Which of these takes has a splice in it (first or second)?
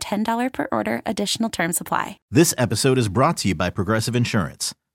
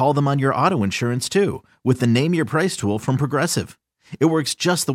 first